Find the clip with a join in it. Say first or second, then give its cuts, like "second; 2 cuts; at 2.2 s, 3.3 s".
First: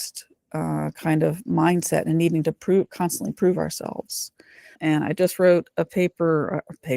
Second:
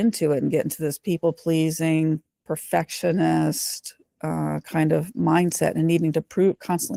first; 1 cut; at 4.7 s